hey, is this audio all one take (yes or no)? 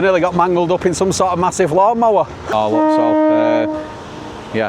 no